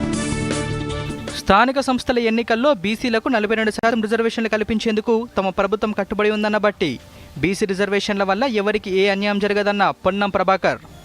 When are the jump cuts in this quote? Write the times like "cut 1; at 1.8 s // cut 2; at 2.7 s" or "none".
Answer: cut 1; at 0.9 s